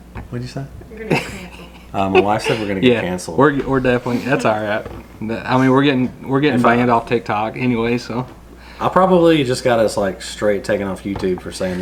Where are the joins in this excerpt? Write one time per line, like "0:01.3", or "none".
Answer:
none